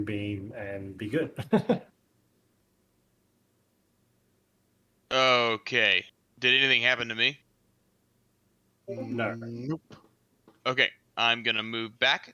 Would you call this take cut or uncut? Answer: cut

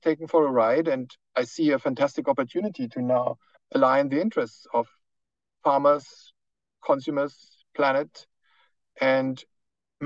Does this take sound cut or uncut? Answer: uncut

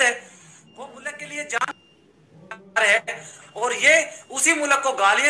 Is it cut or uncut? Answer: uncut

